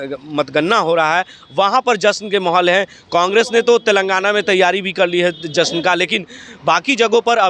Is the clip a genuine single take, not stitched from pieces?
yes; 0 cuts

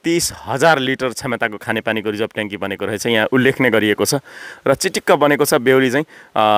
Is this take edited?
no; 0 cuts

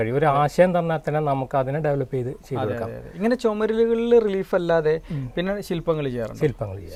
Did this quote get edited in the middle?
no; 0 cuts

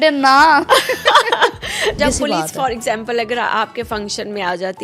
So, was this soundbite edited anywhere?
yes; 1 cut; at 2.0 s

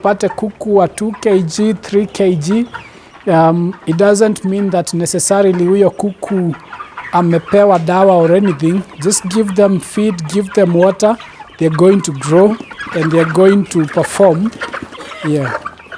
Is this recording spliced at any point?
no; 0 cuts

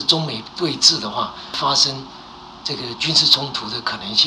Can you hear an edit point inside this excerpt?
no; 0 cuts

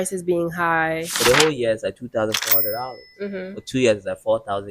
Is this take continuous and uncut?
no; 1 cut; at 1.1 s

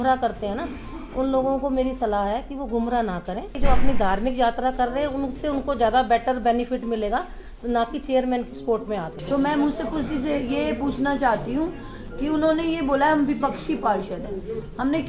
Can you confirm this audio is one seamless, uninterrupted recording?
no; 2 cuts; at 3.5 s, 9.1 s

